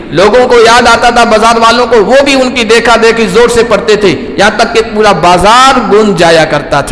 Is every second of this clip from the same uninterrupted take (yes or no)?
yes